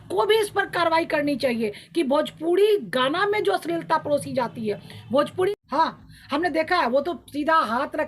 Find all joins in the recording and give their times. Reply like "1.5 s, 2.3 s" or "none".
5.5 s